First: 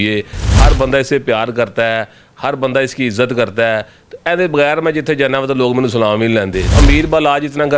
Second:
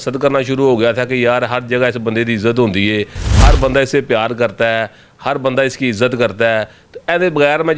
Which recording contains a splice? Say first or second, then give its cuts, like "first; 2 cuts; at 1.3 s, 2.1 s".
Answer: first; 1 cut; at 6.8 s